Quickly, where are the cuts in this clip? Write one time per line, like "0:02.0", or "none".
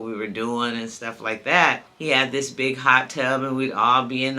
0:01.9

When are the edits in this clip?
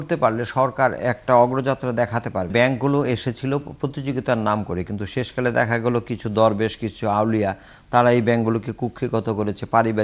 0:02.5

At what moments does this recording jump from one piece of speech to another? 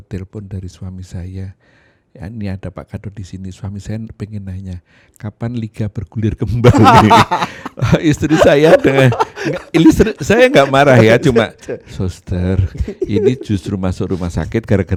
none

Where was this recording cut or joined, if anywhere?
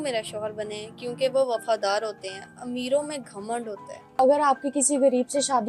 0:04.1

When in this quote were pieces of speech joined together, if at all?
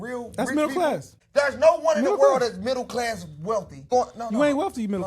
0:01.2
0:03.9

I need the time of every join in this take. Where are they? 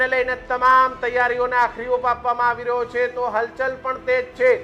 none

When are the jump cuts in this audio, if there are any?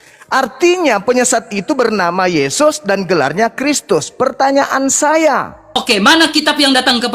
0:05.7

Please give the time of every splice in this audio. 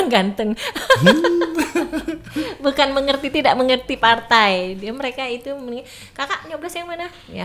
none

